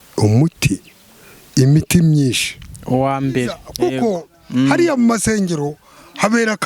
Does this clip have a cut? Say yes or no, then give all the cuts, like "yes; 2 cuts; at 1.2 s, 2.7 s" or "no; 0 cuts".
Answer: yes; 1 cut; at 3.6 s